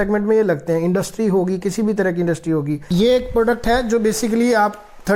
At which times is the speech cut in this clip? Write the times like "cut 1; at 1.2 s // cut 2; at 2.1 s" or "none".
cut 1; at 2.9 s